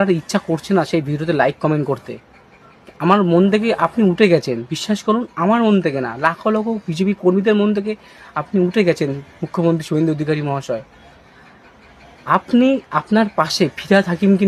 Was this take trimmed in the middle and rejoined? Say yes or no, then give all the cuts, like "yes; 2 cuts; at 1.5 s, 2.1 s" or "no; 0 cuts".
no; 0 cuts